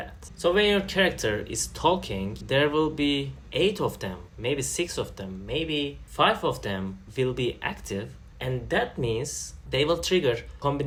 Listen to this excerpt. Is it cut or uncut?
uncut